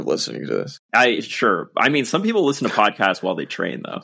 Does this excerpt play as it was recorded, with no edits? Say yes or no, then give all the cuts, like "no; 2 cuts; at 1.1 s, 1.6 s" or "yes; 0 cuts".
yes; 0 cuts